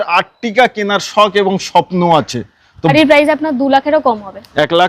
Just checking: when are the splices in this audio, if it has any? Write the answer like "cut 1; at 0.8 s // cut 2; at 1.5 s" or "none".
cut 1; at 2.9 s